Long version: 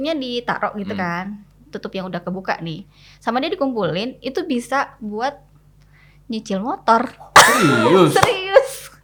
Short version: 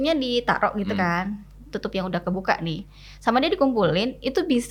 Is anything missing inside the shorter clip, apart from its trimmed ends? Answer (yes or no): no